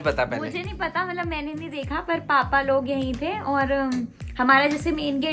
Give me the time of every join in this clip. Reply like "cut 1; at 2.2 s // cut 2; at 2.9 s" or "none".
none